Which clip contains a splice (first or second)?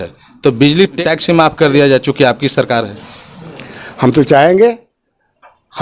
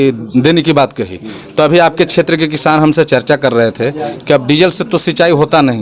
first